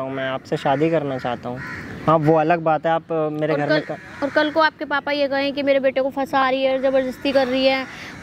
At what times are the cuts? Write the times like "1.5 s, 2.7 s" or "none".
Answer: none